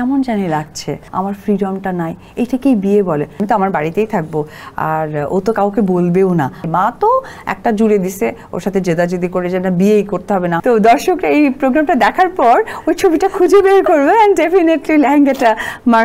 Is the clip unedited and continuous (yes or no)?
no